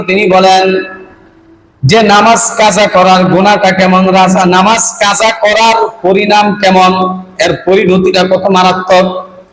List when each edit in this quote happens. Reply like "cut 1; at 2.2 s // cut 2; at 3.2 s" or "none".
none